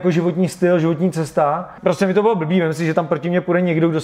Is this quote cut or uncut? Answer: cut